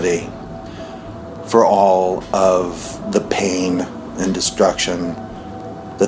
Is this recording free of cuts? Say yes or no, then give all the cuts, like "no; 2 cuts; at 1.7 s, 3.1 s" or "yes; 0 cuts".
yes; 0 cuts